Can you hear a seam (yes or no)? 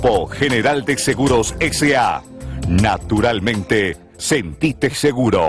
no